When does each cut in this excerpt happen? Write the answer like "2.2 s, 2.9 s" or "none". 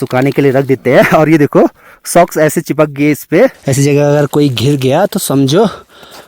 3.6 s